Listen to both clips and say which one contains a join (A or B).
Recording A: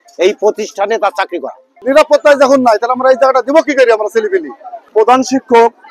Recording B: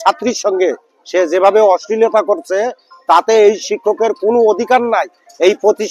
A